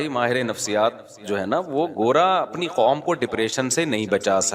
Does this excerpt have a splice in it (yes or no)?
no